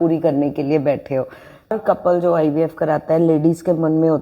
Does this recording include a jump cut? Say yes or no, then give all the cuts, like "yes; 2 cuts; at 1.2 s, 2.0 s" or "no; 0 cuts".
yes; 1 cut; at 1.7 s